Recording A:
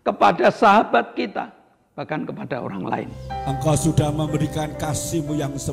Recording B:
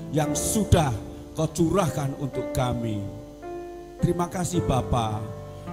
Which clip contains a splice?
A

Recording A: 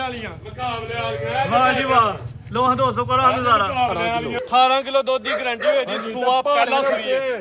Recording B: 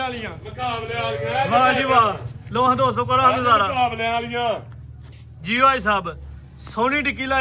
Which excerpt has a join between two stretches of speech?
A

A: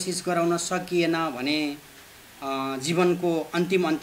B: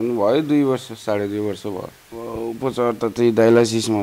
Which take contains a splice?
B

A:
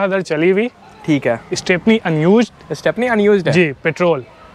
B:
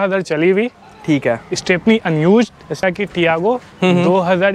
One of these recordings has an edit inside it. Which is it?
B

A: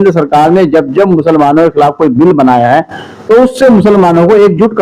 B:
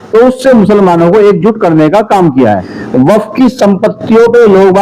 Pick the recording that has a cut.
B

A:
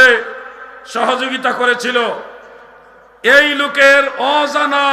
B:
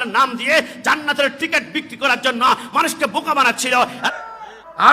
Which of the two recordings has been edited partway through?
B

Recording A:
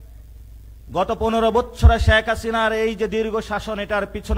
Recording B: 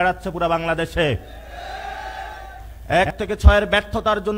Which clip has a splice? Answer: B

